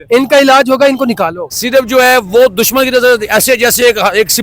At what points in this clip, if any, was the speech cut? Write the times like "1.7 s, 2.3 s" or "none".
1.4 s